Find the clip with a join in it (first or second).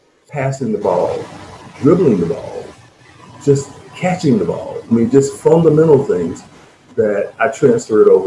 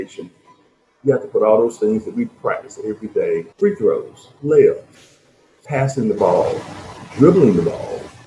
second